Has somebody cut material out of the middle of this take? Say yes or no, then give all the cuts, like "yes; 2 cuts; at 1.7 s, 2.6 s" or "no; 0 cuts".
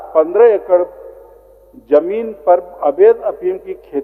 no; 0 cuts